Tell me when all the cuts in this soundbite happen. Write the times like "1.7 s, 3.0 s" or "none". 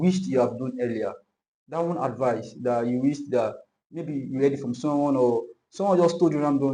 none